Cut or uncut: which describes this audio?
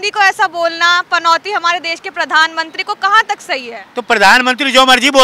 uncut